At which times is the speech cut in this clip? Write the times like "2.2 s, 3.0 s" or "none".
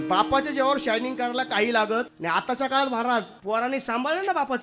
2.2 s, 3.3 s